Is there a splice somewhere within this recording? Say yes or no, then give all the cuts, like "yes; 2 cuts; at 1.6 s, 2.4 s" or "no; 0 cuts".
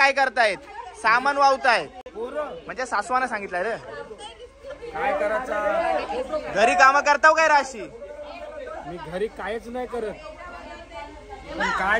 no; 0 cuts